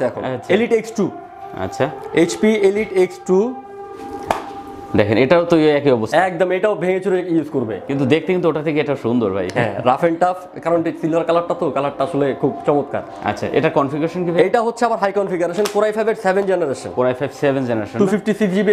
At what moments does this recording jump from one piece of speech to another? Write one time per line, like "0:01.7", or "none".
none